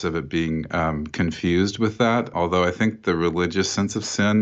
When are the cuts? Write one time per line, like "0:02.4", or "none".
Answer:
0:02.3